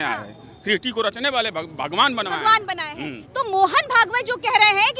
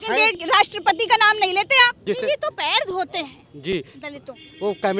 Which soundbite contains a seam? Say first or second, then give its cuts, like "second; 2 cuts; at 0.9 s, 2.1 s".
second; 1 cut; at 2.0 s